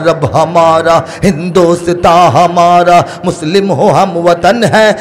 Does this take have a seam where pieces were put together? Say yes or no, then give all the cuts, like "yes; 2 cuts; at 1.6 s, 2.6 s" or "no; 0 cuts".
no; 0 cuts